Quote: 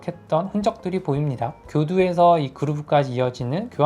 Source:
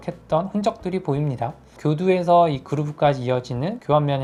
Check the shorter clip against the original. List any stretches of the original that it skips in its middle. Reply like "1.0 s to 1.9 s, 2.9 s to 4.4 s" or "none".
1.6 s to 1.7 s